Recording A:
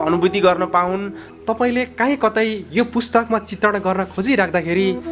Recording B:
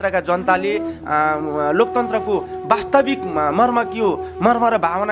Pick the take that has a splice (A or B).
A